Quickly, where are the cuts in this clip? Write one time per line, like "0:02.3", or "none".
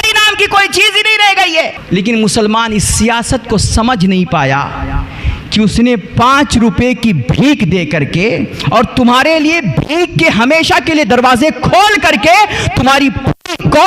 0:01.8